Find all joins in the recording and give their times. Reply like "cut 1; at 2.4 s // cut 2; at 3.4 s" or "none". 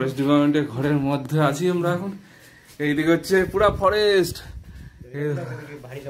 none